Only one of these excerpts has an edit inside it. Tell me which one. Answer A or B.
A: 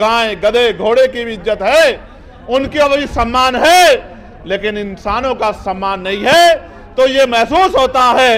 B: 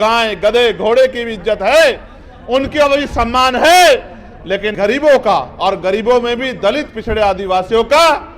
B